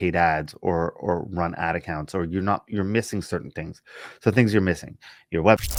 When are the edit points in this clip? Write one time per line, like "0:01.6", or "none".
none